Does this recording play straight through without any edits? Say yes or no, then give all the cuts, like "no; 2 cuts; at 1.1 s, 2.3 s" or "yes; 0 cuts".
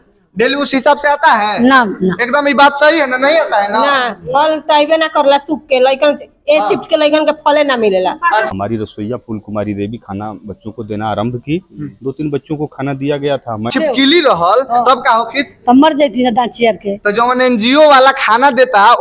no; 2 cuts; at 8.5 s, 13.7 s